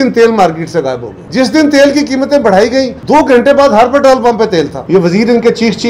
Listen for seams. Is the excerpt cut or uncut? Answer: cut